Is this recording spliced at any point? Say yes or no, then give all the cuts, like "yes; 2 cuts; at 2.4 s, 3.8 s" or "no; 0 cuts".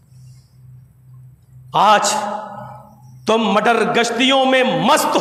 no; 0 cuts